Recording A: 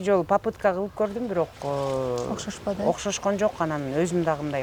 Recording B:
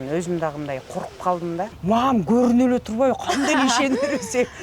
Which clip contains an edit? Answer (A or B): B